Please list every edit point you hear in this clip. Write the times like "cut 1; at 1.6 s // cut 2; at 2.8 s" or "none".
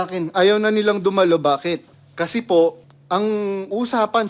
cut 1; at 2.0 s // cut 2; at 2.9 s